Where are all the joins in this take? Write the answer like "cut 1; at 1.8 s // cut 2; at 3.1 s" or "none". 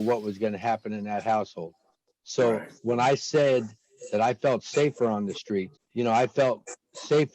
cut 1; at 5.8 s

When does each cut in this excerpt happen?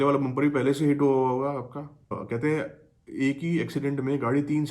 cut 1; at 2.1 s

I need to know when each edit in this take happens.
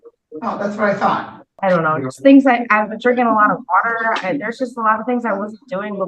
cut 1; at 1.5 s

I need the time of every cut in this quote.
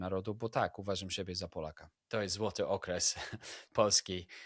cut 1; at 1.9 s

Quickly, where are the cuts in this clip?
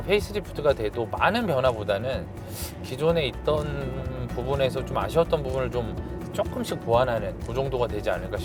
none

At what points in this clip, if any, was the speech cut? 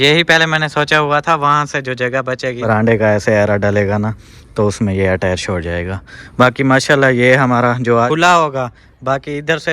cut 1; at 2.6 s // cut 2; at 8.1 s

